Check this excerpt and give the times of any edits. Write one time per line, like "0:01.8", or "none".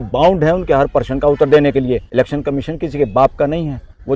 0:02.0